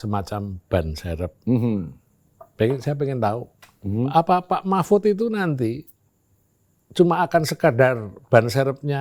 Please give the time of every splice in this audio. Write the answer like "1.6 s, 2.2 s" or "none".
none